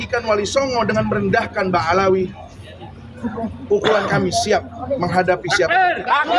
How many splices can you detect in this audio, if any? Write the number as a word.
zero